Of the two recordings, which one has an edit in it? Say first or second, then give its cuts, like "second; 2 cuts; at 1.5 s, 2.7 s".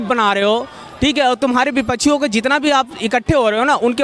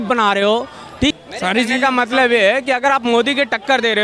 second; 1 cut; at 1.1 s